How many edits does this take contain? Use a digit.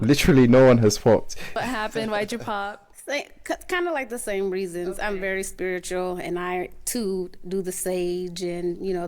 1